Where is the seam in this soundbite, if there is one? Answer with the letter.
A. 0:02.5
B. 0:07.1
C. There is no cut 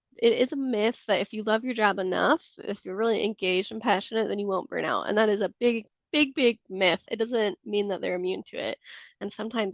B